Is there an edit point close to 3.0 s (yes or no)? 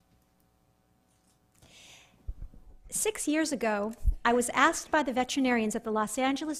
yes